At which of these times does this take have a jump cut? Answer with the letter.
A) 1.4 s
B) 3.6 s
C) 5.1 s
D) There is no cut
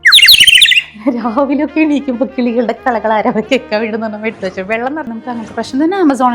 C